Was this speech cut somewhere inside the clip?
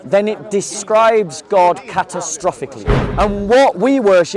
yes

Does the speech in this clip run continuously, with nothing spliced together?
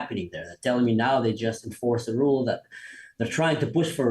yes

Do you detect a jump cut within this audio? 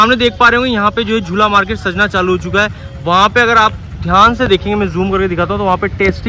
no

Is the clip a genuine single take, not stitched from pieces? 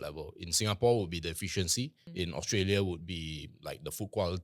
no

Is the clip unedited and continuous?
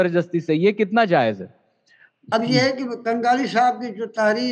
no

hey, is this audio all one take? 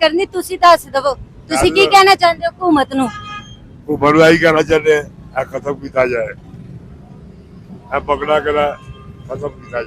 yes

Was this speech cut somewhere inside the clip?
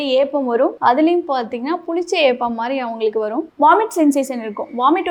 no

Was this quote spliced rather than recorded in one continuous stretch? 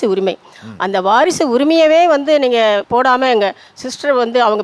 yes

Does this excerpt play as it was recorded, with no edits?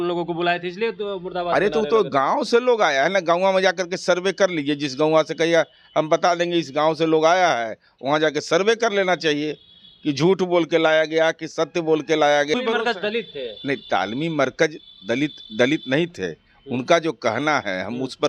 no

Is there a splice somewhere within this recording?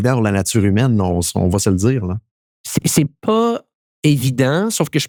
no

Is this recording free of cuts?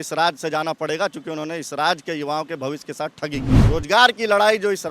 no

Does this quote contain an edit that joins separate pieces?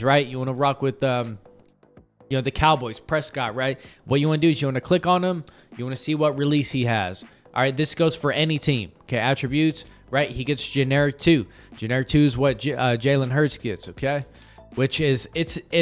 no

